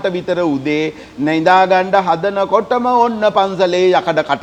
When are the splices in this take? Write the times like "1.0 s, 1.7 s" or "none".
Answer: none